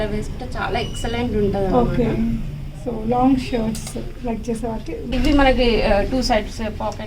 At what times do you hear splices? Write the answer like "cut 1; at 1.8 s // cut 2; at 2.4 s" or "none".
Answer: cut 1; at 5.1 s